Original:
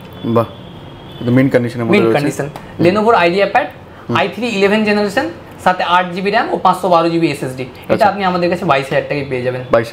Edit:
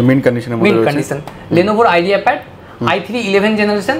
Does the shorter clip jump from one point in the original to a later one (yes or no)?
no